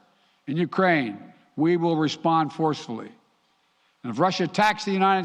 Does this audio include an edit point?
yes; 1 cut; at 4.3 s

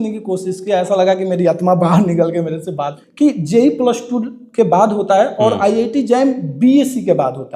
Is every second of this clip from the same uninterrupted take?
no; 1 cut; at 3.0 s

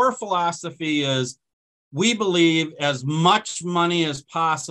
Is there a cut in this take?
no; 0 cuts

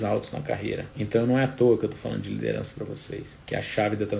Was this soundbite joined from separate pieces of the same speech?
yes; 2 cuts; at 0.9 s, 3.3 s

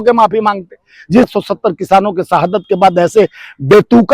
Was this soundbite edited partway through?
yes; 1 cut; at 1.3 s

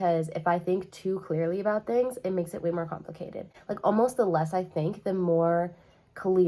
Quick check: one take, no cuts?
yes; 0 cuts

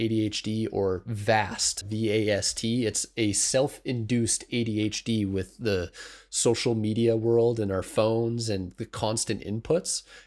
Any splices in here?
yes; 1 cut; at 1.8 s

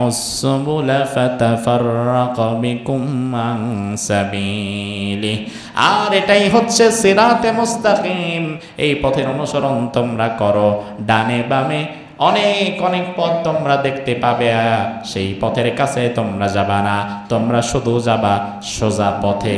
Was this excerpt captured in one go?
yes; 0 cuts

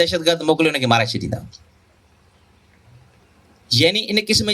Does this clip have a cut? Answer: no; 0 cuts

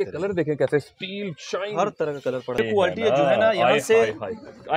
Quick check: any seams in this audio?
yes; 1 cut; at 2.6 s

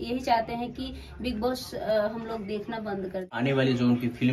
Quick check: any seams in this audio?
yes; 1 cut; at 3.2 s

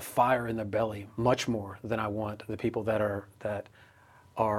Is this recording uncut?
yes; 0 cuts

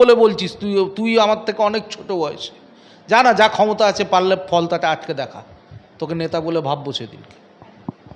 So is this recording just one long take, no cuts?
yes; 0 cuts

